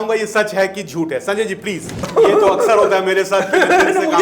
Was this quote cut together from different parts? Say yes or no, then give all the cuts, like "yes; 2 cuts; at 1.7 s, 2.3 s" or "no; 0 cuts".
yes; 1 cut; at 2.1 s